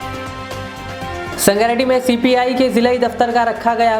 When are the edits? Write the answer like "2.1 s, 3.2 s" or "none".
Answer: 1.3 s